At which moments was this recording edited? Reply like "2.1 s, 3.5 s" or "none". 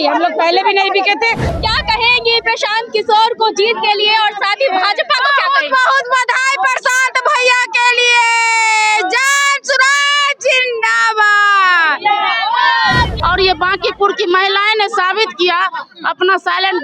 1.5 s, 13.2 s